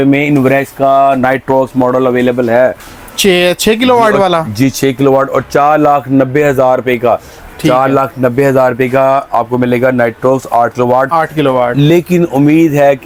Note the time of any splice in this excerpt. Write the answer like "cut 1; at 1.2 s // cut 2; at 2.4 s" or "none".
none